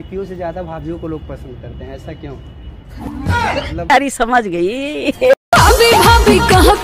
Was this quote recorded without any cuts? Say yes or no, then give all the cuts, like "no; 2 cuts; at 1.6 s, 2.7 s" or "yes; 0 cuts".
no; 1 cut; at 3.7 s